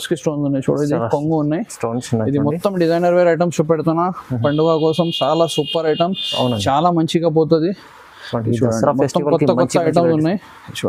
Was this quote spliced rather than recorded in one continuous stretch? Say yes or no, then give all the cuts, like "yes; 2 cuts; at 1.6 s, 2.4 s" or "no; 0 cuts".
no; 0 cuts